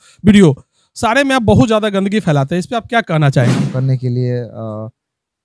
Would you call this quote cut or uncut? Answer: cut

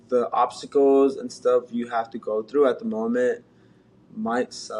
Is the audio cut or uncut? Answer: uncut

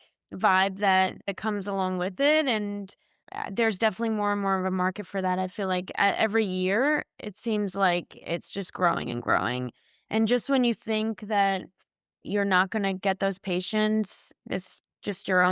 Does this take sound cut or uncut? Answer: cut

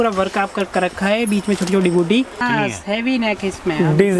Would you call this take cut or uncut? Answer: cut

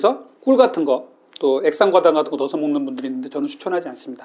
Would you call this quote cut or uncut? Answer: uncut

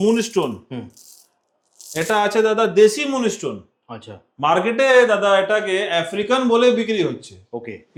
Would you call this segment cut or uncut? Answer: uncut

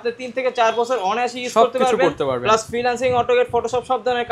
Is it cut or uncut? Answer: uncut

